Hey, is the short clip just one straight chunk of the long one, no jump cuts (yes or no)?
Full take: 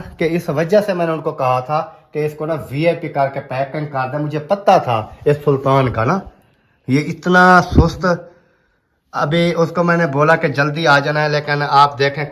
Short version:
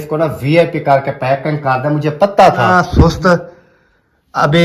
no